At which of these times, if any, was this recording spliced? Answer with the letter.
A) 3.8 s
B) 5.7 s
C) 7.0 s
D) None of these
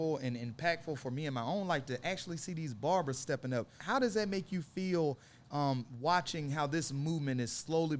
A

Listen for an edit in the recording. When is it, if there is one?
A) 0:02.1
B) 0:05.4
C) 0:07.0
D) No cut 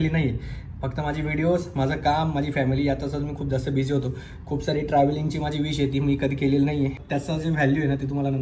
C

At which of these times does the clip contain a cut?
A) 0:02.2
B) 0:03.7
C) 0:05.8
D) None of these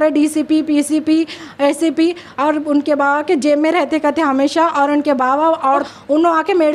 C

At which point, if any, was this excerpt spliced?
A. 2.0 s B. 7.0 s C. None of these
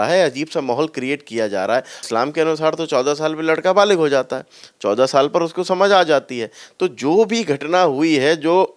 A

